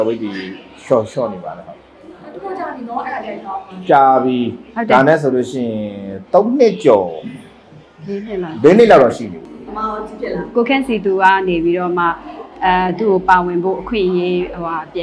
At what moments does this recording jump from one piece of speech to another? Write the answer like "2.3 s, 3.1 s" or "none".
none